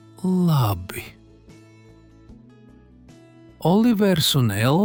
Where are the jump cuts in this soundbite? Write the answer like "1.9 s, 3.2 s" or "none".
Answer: none